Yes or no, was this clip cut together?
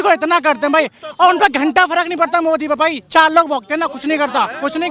no